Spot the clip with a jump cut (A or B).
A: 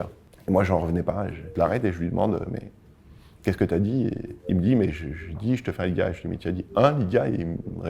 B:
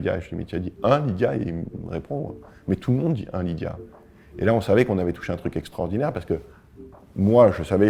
A